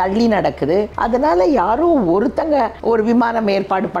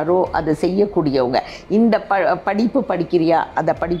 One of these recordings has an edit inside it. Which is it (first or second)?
first